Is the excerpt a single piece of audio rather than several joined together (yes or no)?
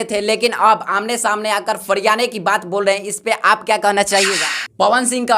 no